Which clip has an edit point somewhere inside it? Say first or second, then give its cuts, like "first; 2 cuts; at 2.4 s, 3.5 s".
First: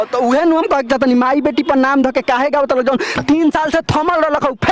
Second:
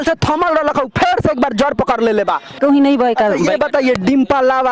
second; 1 cut; at 2.6 s